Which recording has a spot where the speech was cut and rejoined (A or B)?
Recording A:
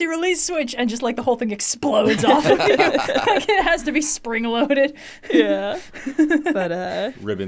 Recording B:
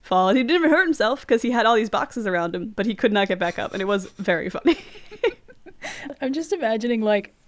B